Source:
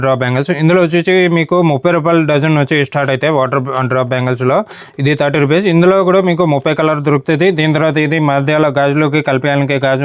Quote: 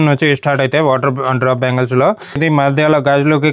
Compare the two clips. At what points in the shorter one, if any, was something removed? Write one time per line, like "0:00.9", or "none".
0:02.4